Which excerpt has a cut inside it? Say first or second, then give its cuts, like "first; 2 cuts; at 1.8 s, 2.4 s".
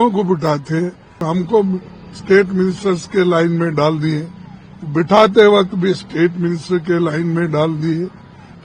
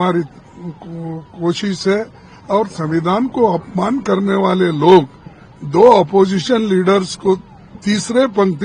first; 1 cut; at 1.2 s